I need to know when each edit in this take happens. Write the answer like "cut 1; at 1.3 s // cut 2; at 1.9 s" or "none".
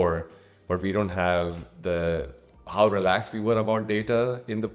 none